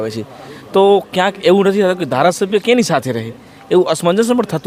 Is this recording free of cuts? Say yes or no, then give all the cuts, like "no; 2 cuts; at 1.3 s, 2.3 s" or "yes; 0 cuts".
yes; 0 cuts